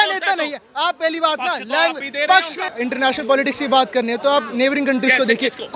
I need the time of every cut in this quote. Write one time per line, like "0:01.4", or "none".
0:02.7